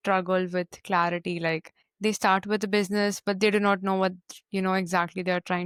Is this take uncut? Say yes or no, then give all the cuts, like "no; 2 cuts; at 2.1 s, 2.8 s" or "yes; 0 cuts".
yes; 0 cuts